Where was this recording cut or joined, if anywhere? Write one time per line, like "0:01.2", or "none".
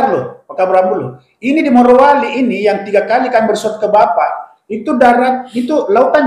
none